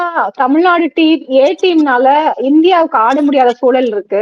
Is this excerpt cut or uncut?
uncut